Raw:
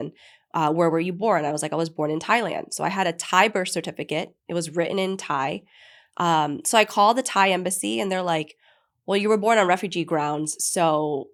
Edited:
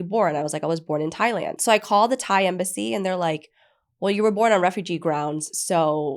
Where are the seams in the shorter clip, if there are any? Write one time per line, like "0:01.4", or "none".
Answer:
0:01.6